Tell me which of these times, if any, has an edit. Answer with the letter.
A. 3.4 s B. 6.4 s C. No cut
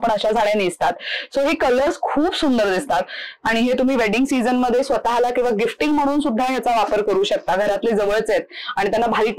C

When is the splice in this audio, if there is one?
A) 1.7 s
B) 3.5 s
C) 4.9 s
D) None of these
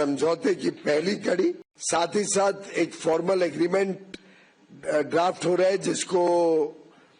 A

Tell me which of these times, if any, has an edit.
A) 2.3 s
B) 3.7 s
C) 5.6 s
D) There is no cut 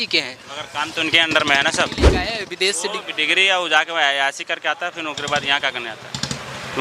A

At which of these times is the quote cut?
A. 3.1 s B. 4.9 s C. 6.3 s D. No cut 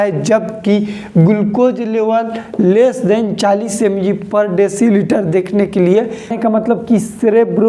C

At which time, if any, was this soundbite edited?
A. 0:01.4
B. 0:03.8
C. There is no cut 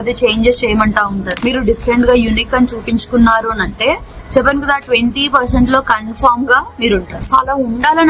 A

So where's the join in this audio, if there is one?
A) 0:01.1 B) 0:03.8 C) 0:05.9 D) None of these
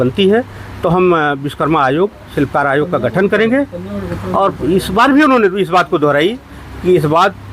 D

